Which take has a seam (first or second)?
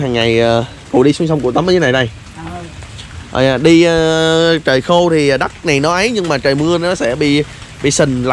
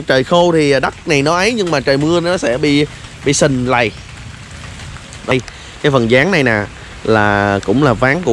second